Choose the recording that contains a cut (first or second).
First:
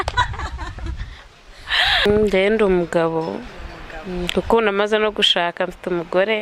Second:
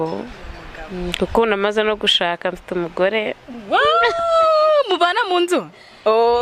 first